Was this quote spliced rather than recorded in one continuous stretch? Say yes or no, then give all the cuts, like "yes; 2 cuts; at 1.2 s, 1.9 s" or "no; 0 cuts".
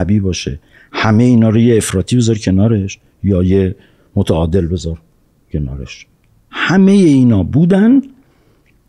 no; 0 cuts